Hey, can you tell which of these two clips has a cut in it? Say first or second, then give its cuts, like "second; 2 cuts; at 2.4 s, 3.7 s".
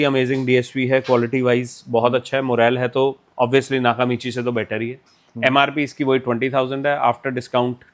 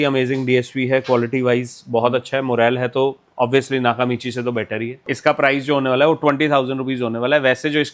second; 1 cut; at 5.0 s